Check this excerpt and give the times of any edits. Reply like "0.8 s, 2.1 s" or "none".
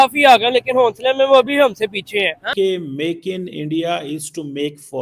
2.5 s